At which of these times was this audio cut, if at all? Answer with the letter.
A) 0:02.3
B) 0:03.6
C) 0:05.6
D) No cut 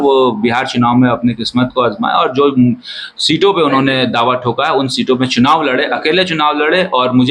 D